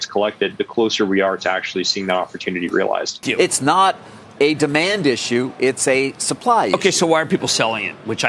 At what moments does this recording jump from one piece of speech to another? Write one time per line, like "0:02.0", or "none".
0:03.2